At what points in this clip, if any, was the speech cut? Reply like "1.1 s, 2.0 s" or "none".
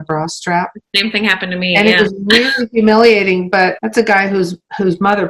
3.8 s